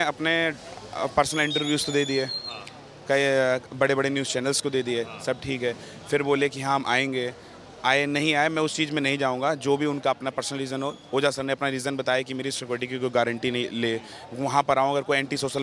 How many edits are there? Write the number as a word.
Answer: zero